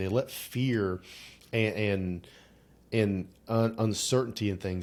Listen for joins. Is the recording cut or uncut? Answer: uncut